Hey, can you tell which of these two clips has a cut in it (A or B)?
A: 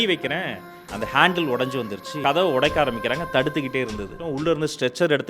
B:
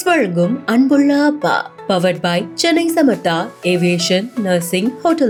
A